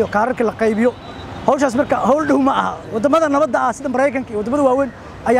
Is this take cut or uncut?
uncut